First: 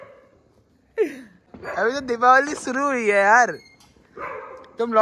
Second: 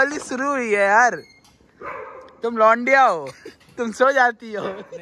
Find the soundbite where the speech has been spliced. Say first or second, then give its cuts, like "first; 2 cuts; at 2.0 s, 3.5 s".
first; 1 cut; at 1.3 s